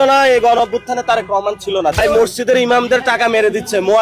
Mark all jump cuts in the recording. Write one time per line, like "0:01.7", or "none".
0:02.0